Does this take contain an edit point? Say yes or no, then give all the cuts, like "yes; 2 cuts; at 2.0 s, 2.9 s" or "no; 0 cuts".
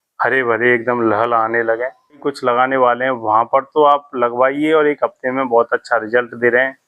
yes; 1 cut; at 2.2 s